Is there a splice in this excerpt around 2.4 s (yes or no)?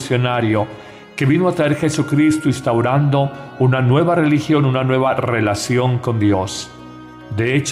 yes